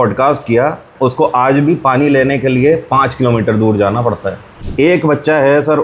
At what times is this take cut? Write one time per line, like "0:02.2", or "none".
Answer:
0:00.9
0:04.5